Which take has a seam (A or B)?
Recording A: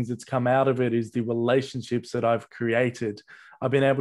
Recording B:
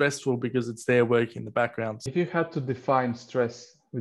B